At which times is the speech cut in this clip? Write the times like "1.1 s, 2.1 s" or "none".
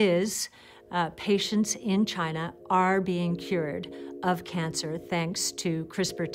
none

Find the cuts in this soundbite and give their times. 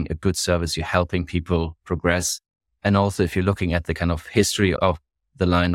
4.8 s

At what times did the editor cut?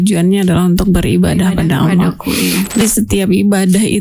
2.8 s

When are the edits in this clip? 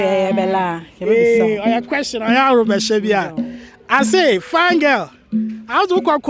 none

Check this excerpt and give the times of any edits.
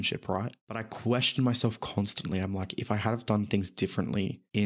none

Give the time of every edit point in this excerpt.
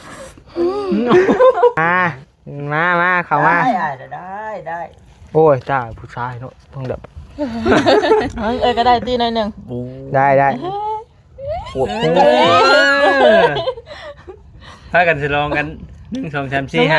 1.8 s

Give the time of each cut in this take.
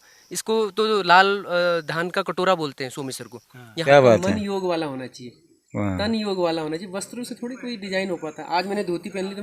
3.9 s

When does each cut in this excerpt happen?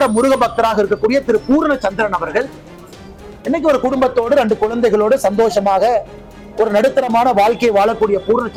none

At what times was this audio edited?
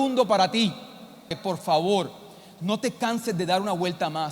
1.3 s

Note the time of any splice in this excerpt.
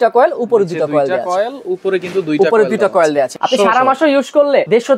3.4 s

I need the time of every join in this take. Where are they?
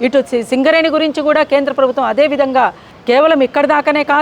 2.9 s

